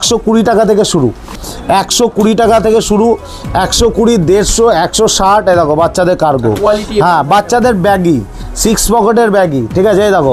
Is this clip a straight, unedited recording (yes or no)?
yes